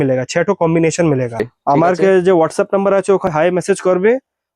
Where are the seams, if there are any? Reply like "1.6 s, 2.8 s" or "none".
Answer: 1.5 s, 3.3 s